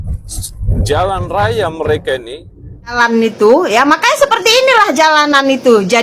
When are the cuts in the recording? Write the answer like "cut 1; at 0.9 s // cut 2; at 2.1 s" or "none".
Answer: cut 1; at 2.9 s